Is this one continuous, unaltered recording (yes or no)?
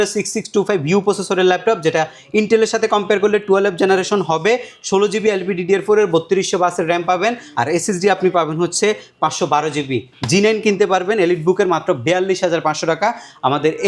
yes